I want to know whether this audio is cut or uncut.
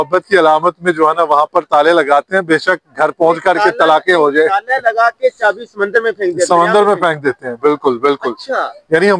uncut